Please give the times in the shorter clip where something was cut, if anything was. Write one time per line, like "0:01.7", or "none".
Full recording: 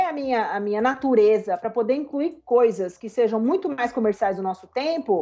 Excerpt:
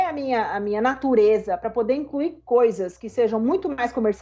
none

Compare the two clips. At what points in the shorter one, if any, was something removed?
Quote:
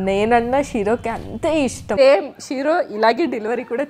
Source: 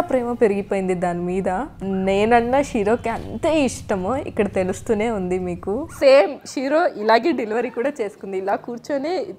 0:02.0

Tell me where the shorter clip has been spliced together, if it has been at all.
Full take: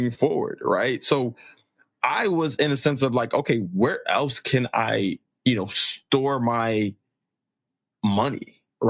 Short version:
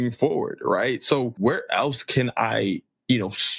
0:01.3

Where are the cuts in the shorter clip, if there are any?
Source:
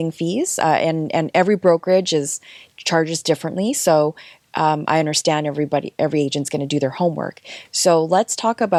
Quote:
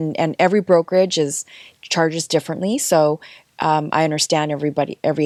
none

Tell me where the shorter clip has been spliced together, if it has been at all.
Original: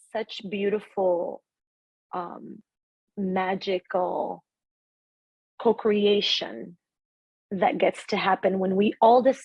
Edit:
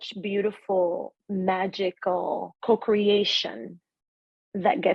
0:01.2
0:02.5

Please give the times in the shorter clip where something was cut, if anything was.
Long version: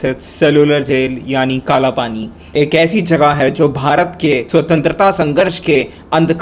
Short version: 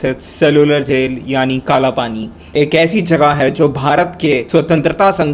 none

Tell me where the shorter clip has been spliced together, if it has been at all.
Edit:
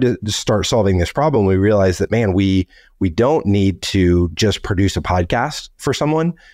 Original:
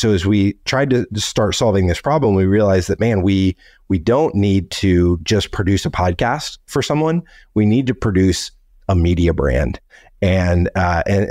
none

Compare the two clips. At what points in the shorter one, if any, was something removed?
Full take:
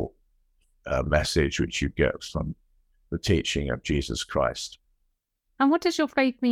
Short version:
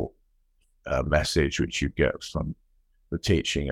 none

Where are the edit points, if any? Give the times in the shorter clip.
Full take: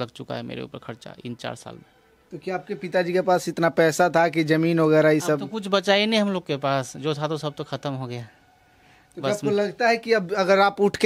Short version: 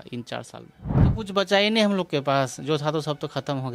0:01.1

